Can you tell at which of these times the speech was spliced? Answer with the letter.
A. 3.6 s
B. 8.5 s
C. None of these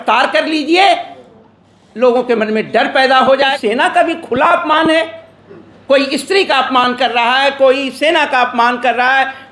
A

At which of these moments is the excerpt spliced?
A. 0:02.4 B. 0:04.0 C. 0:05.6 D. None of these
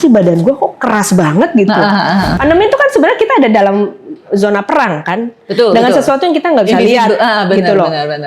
A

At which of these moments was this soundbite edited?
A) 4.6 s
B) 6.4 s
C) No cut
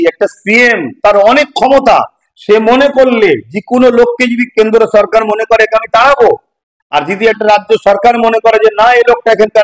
C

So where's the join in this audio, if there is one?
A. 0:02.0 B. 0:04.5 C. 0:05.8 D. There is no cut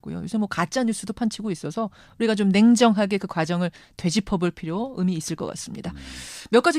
A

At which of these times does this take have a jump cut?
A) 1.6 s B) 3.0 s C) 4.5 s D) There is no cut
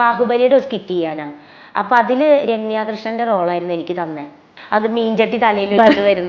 C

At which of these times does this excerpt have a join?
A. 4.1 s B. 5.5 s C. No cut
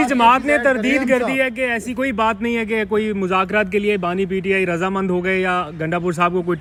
C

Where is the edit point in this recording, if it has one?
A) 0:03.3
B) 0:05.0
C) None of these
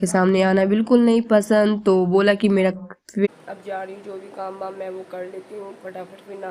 A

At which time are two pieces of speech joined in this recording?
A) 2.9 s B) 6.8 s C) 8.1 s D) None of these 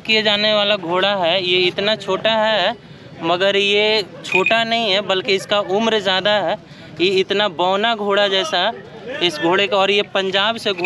D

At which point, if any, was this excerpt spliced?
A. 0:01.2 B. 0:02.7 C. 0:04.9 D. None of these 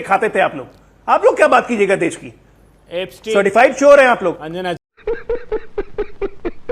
C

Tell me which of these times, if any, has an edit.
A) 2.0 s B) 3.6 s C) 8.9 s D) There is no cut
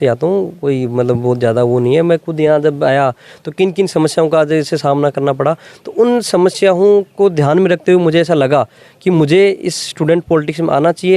D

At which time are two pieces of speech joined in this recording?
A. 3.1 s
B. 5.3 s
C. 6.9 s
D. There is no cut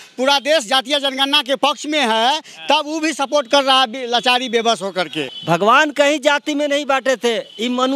B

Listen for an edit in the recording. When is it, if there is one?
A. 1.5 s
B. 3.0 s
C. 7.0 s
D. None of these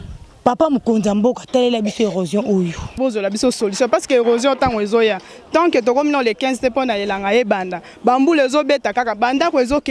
B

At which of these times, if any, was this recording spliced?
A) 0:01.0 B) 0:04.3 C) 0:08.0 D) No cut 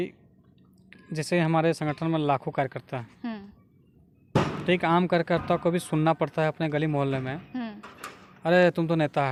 D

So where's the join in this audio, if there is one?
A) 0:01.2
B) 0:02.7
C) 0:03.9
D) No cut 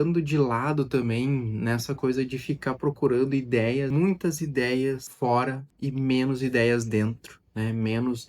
C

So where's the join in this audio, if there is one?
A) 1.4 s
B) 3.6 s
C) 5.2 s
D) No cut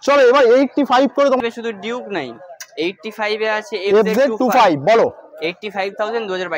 A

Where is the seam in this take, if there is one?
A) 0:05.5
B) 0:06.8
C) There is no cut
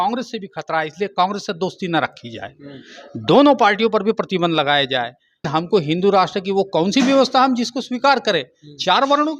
A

